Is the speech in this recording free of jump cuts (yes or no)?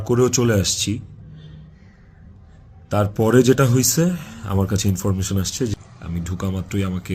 no